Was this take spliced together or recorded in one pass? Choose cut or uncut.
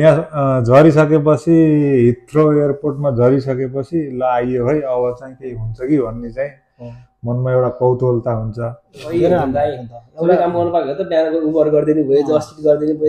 cut